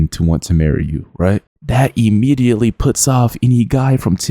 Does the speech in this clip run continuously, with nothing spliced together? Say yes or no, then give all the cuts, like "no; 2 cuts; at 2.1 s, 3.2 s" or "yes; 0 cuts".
no; 1 cut; at 1.5 s